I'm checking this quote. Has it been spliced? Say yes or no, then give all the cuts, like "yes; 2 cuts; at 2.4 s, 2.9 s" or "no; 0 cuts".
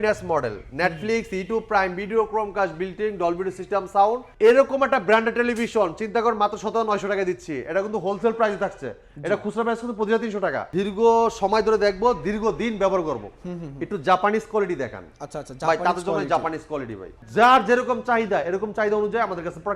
yes; 3 cuts; at 4.3 s, 10.6 s, 17.1 s